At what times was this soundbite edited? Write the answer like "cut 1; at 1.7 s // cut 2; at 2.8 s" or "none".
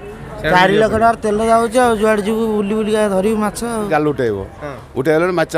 cut 1; at 3.9 s

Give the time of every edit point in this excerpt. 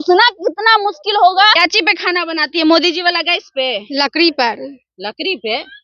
cut 1; at 1.5 s

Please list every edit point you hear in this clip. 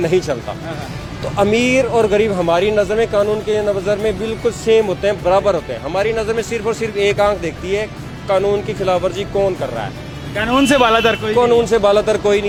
none

